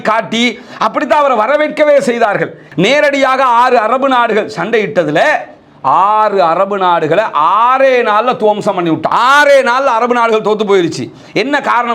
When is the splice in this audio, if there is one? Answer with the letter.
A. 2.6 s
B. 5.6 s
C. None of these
A